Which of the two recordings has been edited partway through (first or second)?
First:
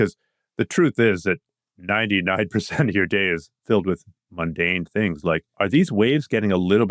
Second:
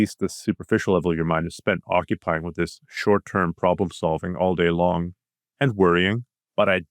first